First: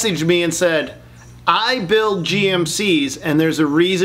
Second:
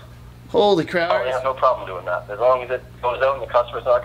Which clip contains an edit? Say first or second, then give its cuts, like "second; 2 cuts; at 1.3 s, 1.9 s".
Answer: second; 1 cut; at 1.0 s